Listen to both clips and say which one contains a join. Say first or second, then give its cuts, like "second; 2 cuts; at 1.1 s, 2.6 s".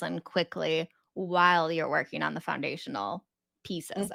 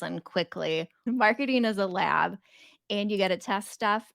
second; 1 cut; at 1.0 s